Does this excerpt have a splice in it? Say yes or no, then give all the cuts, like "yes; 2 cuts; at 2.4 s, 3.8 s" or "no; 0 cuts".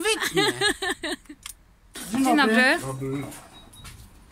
yes; 1 cut; at 2.0 s